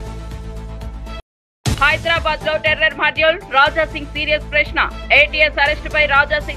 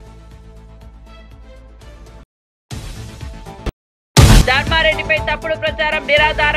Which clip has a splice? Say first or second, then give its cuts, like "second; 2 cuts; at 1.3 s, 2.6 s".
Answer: first; 1 cut; at 1.2 s